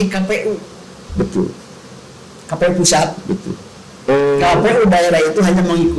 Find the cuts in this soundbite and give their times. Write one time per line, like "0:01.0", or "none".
none